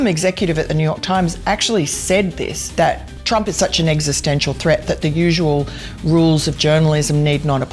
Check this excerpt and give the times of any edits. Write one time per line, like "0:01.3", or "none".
none